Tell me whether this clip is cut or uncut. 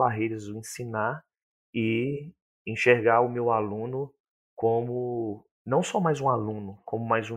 uncut